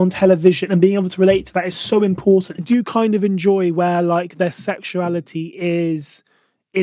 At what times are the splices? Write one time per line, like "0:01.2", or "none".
0:02.6